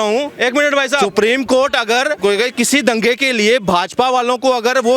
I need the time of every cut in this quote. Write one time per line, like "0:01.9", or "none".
0:01.1
0:02.2